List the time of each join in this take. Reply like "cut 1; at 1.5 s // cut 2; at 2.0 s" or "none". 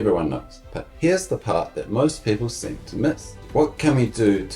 cut 1; at 3.3 s